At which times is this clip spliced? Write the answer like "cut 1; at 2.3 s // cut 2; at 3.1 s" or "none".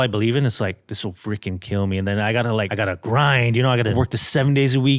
cut 1; at 2.7 s // cut 2; at 3.9 s